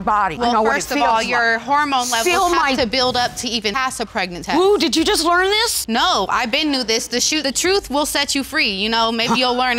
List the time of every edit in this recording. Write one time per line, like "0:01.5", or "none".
none